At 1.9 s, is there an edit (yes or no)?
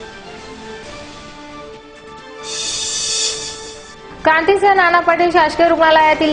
yes